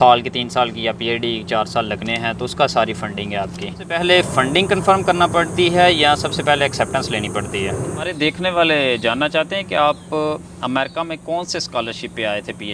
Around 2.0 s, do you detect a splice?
no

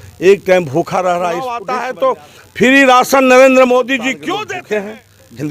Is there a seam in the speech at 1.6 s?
yes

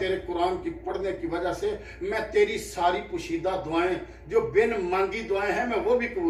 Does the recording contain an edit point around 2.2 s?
no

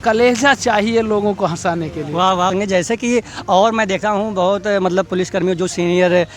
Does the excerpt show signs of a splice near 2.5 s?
yes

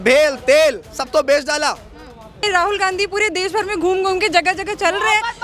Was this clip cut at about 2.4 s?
yes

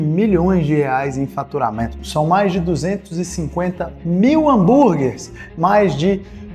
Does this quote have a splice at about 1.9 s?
yes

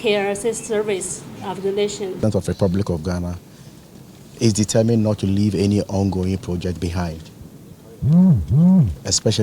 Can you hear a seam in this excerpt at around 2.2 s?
yes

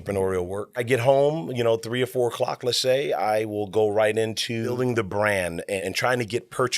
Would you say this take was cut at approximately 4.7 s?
yes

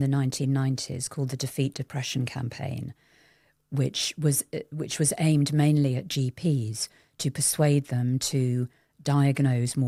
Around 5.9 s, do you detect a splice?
no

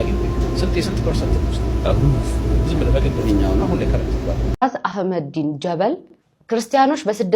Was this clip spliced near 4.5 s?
yes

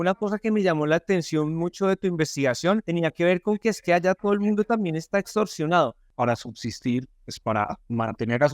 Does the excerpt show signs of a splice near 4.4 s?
no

